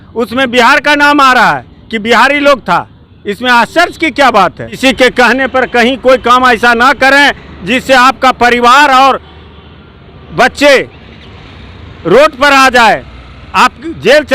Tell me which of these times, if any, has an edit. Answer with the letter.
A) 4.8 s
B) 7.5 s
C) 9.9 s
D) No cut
A